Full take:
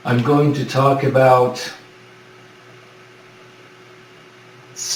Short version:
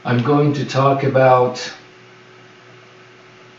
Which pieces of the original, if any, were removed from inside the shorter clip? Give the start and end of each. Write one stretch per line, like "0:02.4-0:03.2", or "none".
none